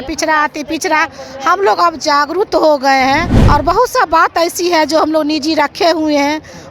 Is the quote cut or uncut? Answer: cut